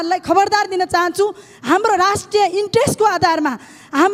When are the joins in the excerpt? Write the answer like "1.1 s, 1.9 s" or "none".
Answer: none